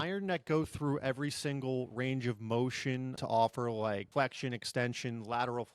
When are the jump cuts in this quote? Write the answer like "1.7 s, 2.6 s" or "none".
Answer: 3.1 s, 4.1 s